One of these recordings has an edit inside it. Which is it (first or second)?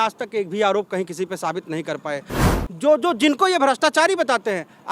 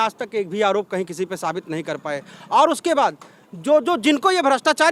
first